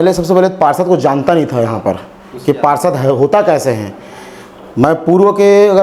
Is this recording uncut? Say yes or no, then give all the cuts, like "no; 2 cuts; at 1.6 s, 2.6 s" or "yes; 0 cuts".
yes; 0 cuts